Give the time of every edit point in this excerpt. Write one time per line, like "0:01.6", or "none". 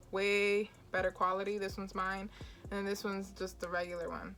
none